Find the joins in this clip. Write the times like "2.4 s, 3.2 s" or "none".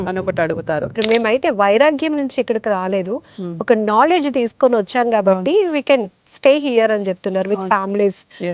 1.0 s